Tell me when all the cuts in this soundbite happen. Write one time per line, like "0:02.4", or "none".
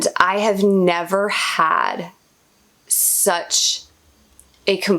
none